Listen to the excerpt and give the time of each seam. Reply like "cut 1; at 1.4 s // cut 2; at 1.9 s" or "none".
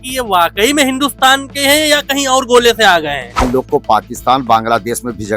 cut 1; at 3.5 s

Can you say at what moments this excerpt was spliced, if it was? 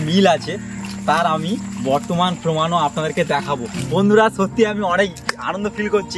cut 1; at 3.9 s

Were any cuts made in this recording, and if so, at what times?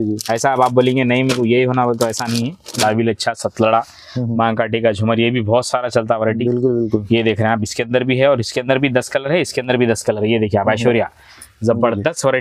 cut 1; at 2.8 s

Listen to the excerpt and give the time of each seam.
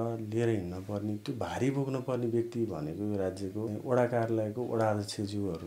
cut 1; at 3.7 s

